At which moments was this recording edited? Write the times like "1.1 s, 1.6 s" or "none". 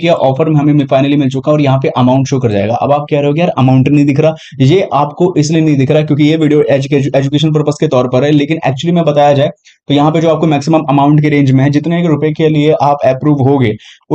none